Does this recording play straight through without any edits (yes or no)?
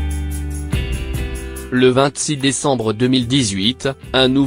no